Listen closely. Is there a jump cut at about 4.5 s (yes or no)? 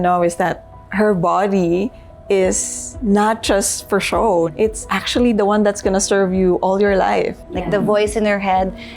yes